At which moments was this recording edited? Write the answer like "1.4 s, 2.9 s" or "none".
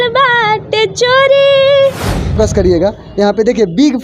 2.3 s